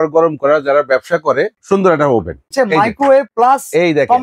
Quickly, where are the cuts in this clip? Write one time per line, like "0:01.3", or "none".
0:01.6
0:02.5
0:03.3

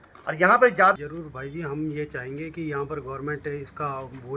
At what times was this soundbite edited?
0:01.0

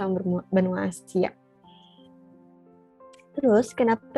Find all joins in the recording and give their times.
none

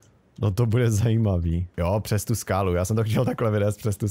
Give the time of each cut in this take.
0:01.7

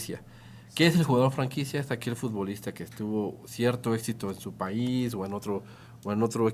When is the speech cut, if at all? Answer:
none

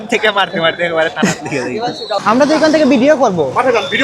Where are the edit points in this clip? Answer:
0:02.2

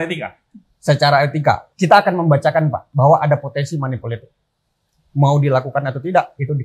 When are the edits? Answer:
0:01.7
0:02.8

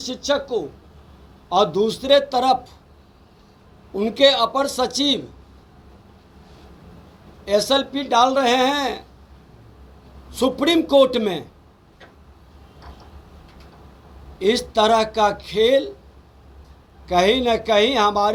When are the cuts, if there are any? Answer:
none

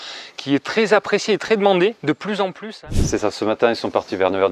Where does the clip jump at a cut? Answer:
0:02.9

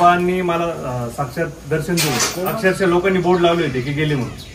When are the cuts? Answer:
0:02.3

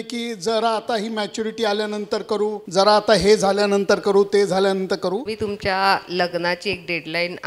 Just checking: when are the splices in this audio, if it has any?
0:02.6
0:05.3

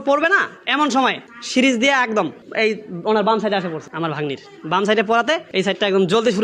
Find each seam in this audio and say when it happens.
0:03.8
0:05.5

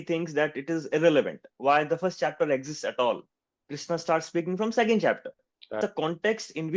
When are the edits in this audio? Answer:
0:05.8

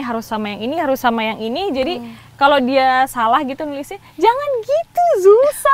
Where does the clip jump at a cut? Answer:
none

